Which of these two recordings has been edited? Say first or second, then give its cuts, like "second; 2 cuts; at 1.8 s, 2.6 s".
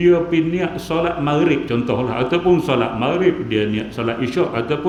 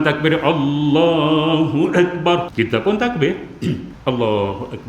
second; 2 cuts; at 2.5 s, 3.9 s